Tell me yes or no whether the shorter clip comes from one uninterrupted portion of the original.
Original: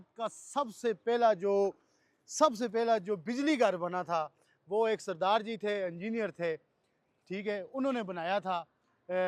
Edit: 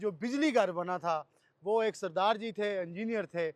yes